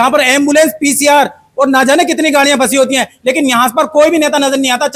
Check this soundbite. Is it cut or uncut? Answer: uncut